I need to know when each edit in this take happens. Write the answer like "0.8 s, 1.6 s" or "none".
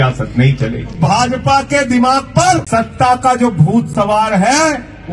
1.0 s, 2.6 s